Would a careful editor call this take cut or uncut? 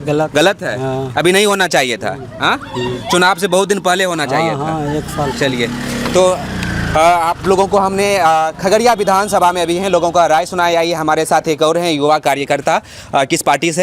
uncut